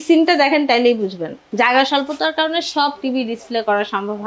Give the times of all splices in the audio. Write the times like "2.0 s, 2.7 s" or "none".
1.4 s